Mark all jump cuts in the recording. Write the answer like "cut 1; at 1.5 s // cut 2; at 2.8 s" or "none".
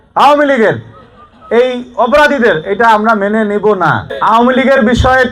cut 1; at 4.1 s

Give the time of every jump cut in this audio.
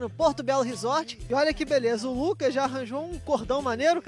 cut 1; at 1.2 s

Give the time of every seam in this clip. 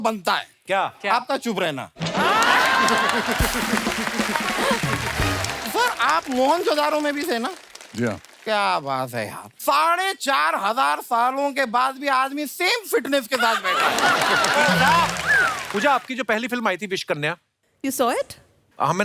cut 1; at 5.5 s // cut 2; at 15.6 s

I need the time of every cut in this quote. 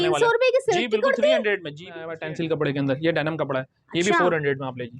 cut 1; at 2.2 s

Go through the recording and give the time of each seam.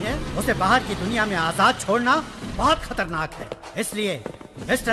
none

